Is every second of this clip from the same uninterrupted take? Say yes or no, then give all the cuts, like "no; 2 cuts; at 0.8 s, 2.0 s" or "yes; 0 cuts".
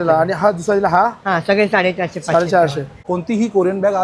no; 1 cut; at 2.9 s